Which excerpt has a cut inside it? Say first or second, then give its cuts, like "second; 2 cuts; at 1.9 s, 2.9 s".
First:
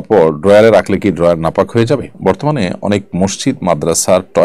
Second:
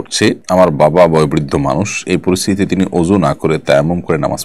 first; 1 cut; at 2.1 s